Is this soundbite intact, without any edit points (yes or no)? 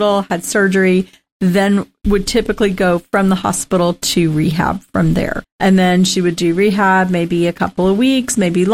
no